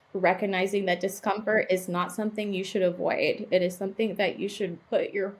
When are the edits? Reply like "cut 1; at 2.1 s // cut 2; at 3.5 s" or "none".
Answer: none